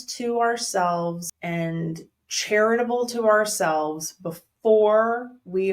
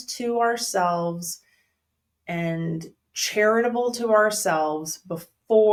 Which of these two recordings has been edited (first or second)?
first